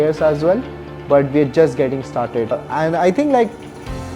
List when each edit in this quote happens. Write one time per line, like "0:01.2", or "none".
0:02.6